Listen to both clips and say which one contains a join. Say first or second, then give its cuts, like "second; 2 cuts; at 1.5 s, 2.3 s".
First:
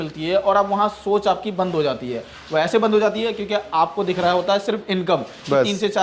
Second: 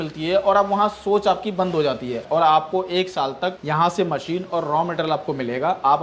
second; 2 cuts; at 2.2 s, 3.6 s